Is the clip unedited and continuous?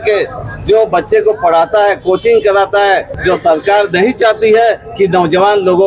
no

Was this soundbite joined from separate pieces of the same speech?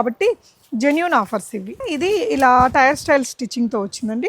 yes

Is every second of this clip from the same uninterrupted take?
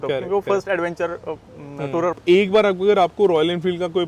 no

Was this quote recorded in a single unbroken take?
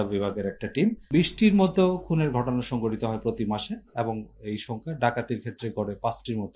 no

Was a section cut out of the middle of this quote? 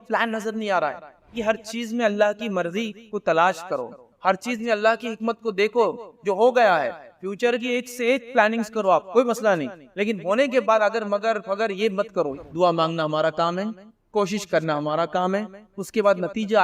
yes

